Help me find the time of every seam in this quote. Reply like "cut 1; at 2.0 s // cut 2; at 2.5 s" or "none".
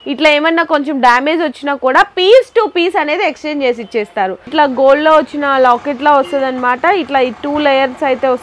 cut 1; at 4.5 s